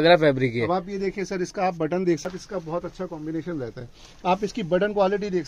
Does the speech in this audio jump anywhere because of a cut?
yes; 1 cut; at 2.3 s

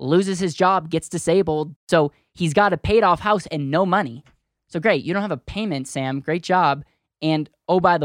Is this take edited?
yes; 1 cut; at 1.7 s

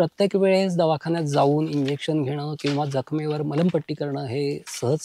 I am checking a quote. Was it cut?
no; 0 cuts

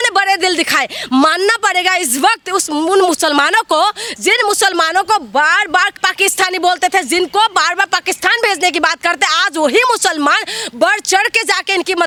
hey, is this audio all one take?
yes; 0 cuts

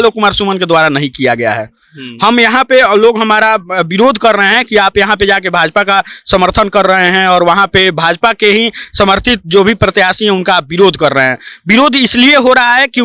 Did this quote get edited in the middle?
no; 0 cuts

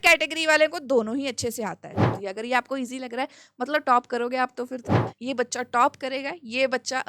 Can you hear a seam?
yes; 2 cuts; at 2.1 s, 5.0 s

